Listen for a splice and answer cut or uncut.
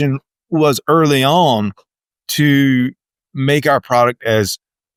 uncut